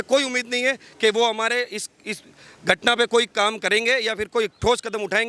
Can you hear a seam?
no; 0 cuts

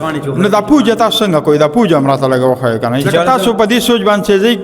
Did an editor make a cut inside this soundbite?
yes; 1 cut; at 3.0 s

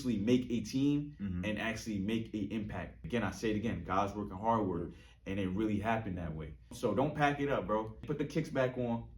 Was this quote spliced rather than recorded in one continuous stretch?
yes; 3 cuts; at 2.9 s, 6.7 s, 8.0 s

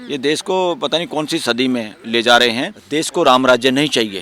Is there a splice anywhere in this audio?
yes; 1 cut; at 2.8 s

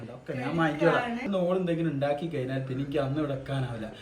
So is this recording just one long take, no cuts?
no; 1 cut; at 1.3 s

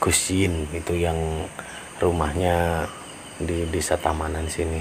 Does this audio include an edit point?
no; 0 cuts

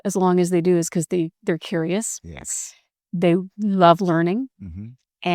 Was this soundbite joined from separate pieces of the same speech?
no; 0 cuts

